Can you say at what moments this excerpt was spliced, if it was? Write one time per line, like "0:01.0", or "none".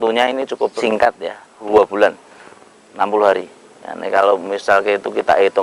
0:01.1